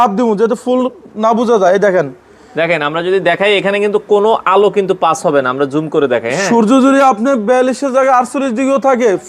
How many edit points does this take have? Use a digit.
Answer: 0